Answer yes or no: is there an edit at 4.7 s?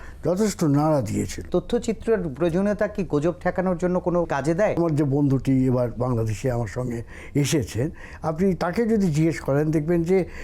yes